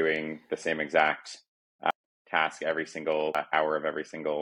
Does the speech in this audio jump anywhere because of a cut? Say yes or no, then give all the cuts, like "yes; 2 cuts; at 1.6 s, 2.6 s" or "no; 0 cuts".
yes; 2 cuts; at 1.9 s, 3.3 s